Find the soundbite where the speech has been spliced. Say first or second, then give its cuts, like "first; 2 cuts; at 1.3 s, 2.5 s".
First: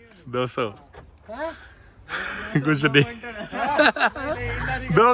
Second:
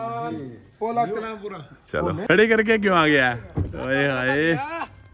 second; 1 cut; at 2.2 s